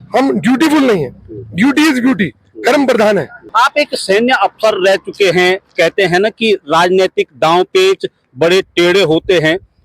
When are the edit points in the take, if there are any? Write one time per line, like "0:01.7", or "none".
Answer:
0:03.4